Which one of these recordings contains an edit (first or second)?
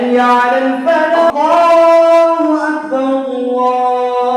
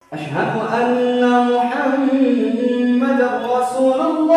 first